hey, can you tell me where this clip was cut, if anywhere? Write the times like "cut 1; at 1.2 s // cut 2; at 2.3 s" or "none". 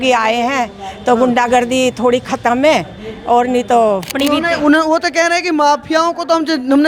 cut 1; at 4.1 s